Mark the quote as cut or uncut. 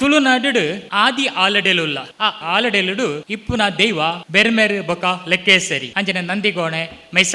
cut